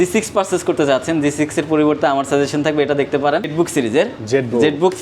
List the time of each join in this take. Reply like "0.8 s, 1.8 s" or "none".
3.5 s